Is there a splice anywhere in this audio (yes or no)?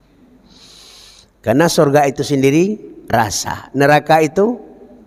no